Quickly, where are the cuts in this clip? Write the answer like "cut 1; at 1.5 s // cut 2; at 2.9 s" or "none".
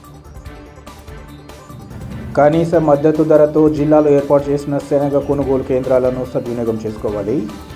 cut 1; at 1.2 s